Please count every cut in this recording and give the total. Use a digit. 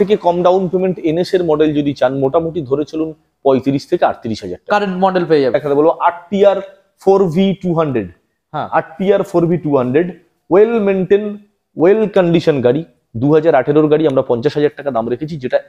1